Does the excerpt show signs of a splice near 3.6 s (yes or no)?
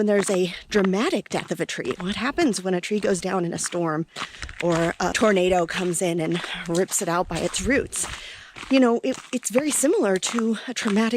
no